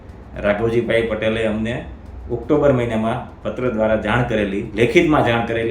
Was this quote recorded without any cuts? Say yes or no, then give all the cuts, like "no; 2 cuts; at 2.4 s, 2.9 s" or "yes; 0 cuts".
no; 1 cut; at 4.6 s